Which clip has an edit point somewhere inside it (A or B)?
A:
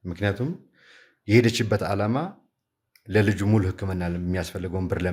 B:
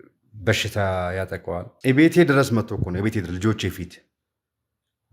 B